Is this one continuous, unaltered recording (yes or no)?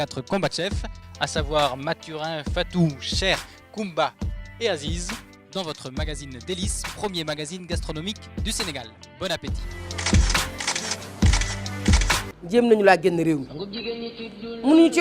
no